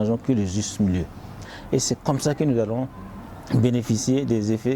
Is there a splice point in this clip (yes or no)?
yes